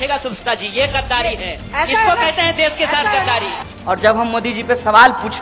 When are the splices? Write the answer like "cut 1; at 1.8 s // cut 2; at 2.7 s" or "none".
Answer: cut 1; at 3.6 s